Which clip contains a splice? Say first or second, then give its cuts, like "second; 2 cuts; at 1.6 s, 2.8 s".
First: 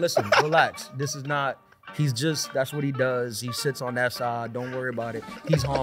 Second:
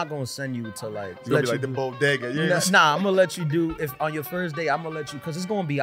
second; 1 cut; at 1.2 s